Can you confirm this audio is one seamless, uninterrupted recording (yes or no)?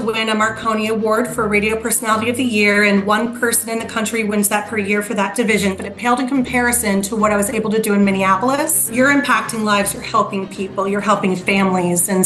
no